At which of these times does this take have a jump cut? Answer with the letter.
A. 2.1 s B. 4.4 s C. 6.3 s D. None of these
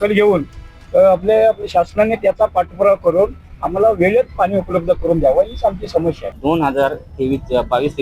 C